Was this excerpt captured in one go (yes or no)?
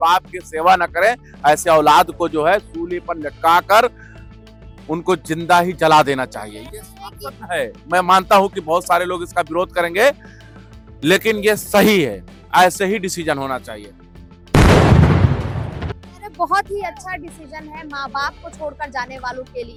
yes